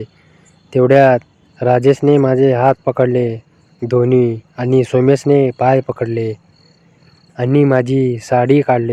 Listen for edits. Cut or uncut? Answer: uncut